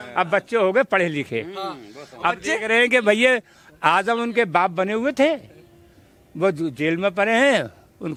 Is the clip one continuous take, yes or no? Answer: yes